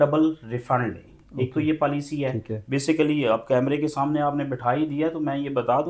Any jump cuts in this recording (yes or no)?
no